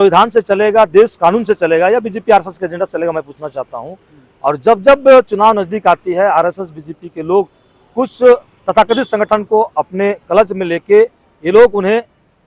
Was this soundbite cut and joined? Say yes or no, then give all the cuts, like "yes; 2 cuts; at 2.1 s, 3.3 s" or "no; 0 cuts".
no; 0 cuts